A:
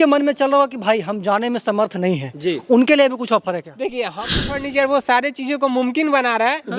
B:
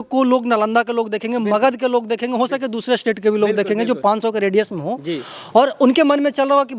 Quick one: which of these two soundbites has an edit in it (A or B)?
A